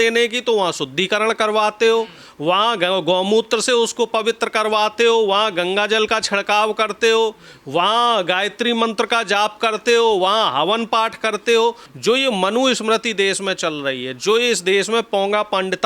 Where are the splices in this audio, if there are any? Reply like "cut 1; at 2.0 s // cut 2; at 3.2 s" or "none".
cut 1; at 11.9 s